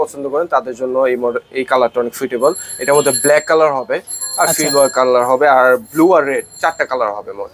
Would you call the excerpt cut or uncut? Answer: uncut